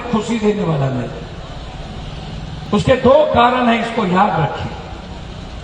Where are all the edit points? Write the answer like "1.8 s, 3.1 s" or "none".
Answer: none